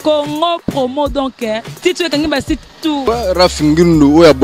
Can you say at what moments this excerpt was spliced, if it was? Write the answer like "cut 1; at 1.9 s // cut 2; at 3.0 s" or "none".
cut 1; at 3.0 s